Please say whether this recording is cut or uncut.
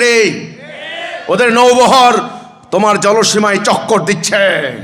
uncut